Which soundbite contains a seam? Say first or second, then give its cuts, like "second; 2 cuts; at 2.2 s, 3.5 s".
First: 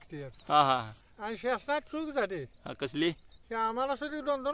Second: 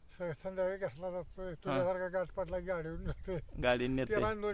first; 1 cut; at 1.0 s